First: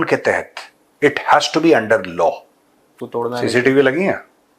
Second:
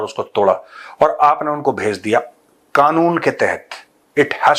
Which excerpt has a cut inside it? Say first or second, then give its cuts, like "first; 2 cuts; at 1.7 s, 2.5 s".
first; 1 cut; at 3.0 s